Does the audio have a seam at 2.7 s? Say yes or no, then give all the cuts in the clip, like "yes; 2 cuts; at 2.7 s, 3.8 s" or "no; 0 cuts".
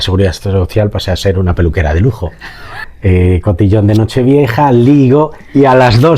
yes; 1 cut; at 2.7 s